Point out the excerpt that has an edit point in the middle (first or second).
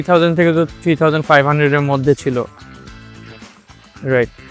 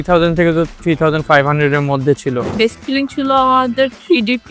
second